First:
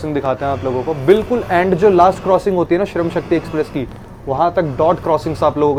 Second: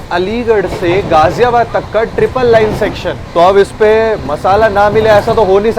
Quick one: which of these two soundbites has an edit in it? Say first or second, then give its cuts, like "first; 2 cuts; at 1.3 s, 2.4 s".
second; 1 cut; at 3.1 s